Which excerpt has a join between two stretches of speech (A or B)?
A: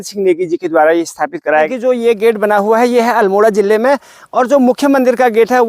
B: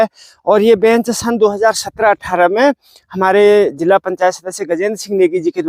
A